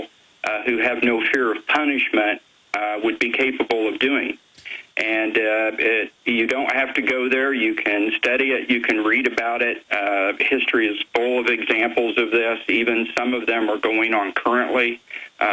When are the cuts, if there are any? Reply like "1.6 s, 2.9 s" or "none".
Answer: none

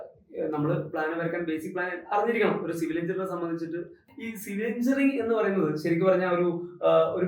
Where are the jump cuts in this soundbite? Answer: 4.0 s

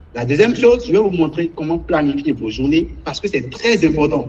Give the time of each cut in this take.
none

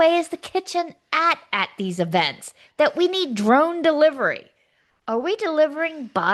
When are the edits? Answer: none

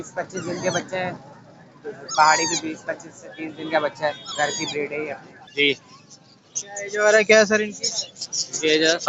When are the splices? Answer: 5.4 s

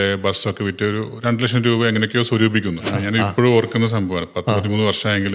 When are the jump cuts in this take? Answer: 2.9 s

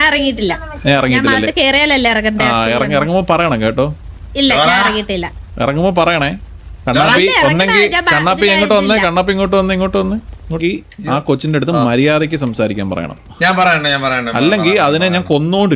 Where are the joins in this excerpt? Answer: 10.6 s

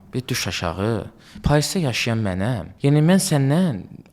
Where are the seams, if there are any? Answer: 2.7 s

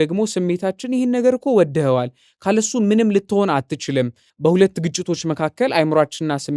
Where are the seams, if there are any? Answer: 4.2 s

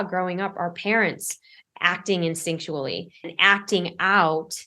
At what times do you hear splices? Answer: 3.3 s

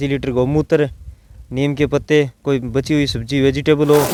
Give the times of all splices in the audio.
none

